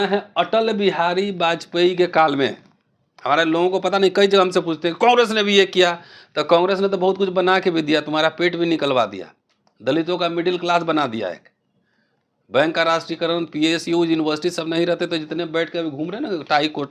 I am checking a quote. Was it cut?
no; 0 cuts

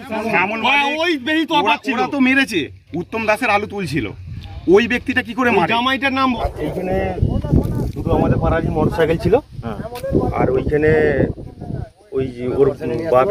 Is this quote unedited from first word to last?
no; 1 cut; at 6.4 s

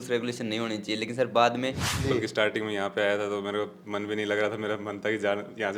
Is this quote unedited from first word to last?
no; 1 cut; at 1.9 s

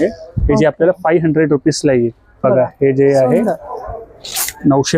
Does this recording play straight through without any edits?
no; 1 cut; at 2.4 s

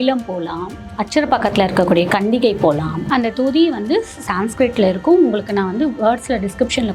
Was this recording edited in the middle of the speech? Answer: yes; 1 cut; at 3.0 s

